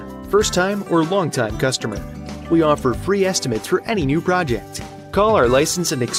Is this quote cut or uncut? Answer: uncut